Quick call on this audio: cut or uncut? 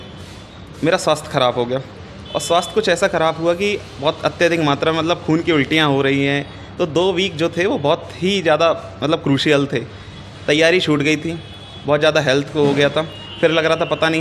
uncut